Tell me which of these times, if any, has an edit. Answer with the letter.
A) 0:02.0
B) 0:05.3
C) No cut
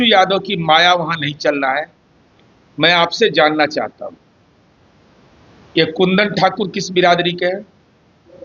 C